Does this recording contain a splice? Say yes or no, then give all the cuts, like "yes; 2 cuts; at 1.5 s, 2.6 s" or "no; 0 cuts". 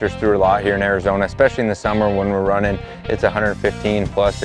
no; 0 cuts